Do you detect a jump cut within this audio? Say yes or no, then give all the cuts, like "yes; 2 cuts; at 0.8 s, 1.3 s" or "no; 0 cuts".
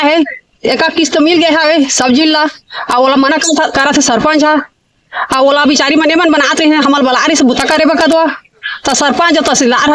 no; 0 cuts